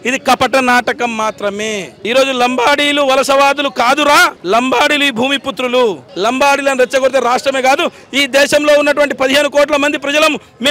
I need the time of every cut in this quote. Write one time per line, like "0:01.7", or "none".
0:01.9
0:06.1